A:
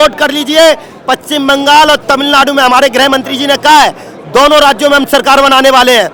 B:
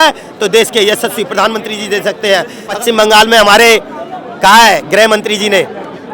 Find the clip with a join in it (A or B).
B